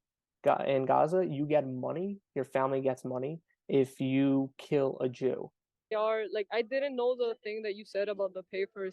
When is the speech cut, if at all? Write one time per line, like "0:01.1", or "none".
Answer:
0:05.9